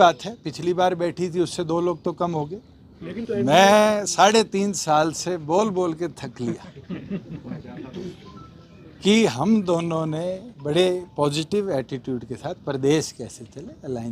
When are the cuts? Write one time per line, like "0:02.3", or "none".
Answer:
0:03.2